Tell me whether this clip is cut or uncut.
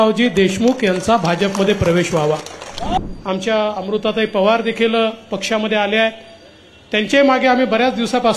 cut